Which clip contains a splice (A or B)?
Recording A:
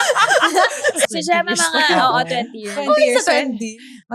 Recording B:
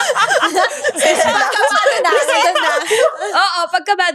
A